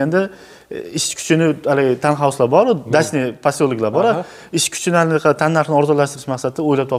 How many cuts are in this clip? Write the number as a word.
zero